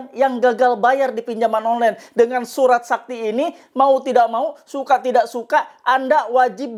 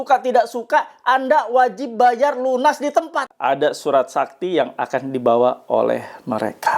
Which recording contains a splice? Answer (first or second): second